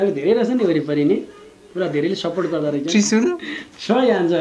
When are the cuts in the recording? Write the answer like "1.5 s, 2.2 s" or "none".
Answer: none

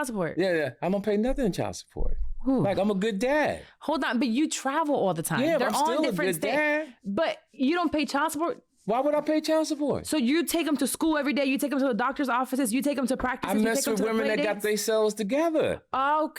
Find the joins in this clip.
none

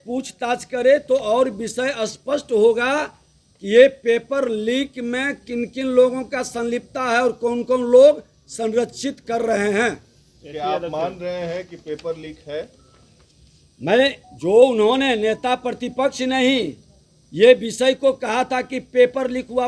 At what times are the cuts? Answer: none

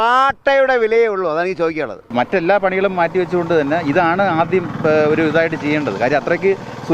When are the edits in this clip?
2.0 s

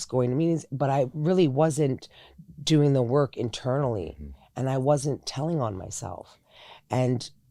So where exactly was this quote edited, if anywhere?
none

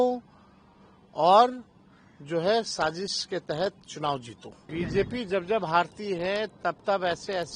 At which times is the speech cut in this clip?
4.5 s

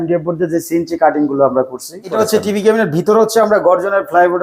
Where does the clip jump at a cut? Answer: 2.1 s

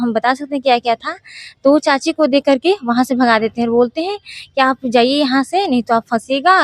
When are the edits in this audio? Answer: none

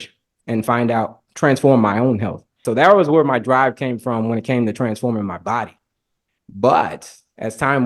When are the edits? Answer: 2.6 s

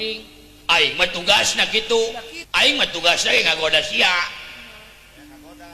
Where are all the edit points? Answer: 2.3 s

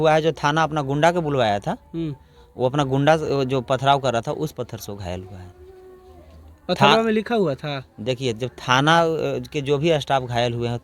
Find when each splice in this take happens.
none

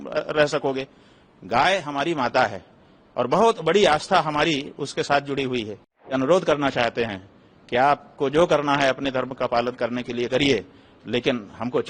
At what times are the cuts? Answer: 6.1 s

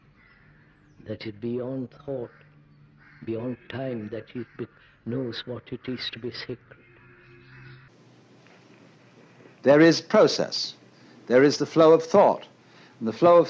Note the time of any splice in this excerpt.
7.9 s

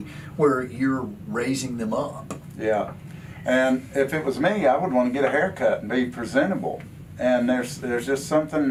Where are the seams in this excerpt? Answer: none

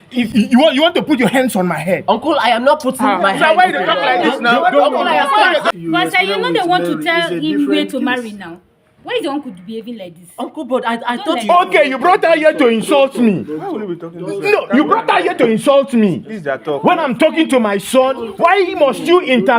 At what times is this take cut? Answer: 5.7 s

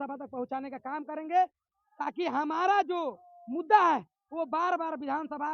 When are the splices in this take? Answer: none

